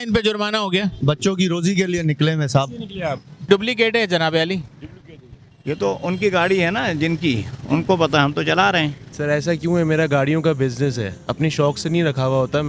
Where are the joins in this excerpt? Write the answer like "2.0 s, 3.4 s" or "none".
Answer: 1.0 s, 3.4 s, 9.1 s